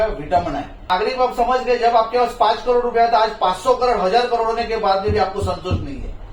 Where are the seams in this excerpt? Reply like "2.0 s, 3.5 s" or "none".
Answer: 0.9 s